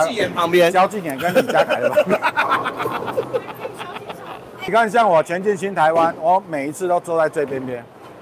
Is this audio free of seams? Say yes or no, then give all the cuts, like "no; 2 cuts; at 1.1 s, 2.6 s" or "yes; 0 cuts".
no; 1 cut; at 4.7 s